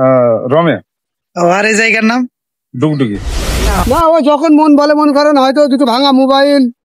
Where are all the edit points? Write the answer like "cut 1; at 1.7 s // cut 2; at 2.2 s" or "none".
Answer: cut 1; at 3.2 s